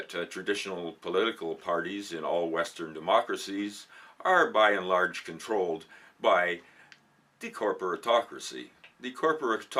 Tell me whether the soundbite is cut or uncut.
uncut